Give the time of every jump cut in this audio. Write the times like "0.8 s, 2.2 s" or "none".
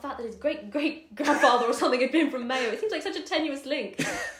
none